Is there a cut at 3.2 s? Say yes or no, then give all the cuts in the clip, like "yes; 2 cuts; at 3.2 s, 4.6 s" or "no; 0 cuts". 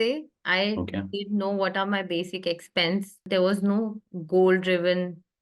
yes; 1 cut; at 3.2 s